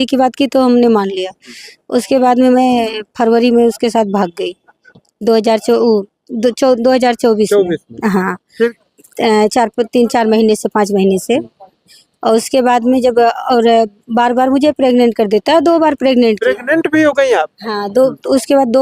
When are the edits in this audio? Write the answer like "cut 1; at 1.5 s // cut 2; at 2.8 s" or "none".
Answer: cut 1; at 8.7 s